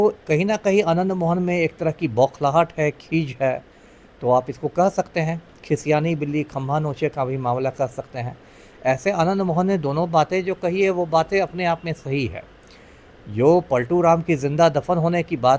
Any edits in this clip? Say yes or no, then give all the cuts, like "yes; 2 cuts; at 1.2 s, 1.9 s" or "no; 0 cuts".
no; 0 cuts